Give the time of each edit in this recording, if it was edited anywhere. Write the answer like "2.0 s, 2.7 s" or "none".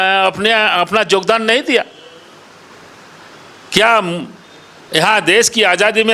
none